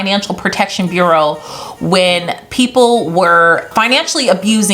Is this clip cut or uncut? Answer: cut